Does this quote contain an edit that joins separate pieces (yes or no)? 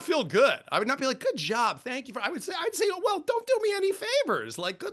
no